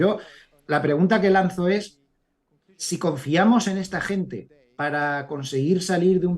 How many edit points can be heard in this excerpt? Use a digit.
0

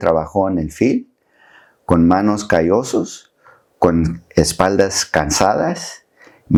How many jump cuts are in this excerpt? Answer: 0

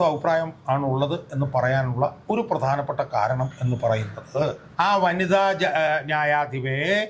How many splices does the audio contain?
1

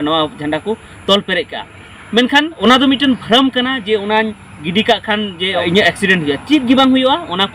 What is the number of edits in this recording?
2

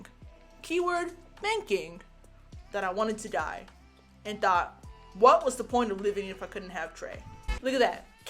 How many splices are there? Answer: 1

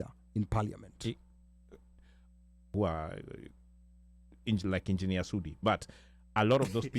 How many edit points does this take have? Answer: 1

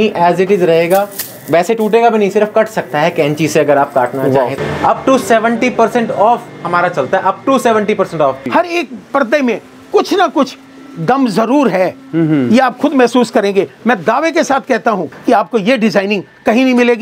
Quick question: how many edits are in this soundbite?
3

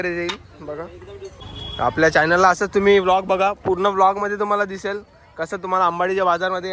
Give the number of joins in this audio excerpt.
1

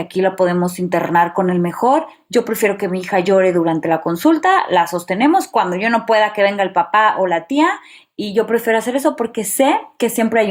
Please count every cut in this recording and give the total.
0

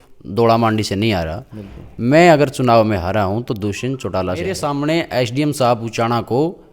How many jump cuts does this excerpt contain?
1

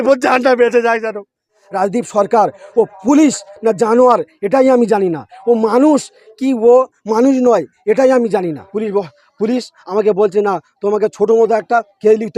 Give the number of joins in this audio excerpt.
2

